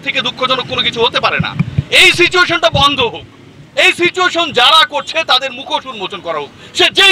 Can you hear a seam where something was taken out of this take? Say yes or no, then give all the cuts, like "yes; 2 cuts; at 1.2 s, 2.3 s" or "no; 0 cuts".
no; 0 cuts